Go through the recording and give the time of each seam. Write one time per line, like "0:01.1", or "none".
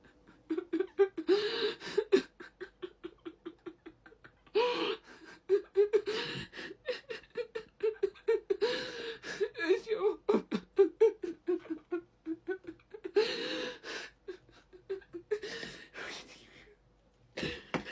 none